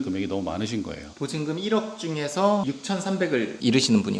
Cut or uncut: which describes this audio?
cut